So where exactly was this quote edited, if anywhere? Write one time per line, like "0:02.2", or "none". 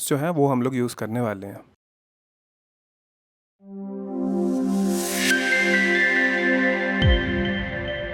none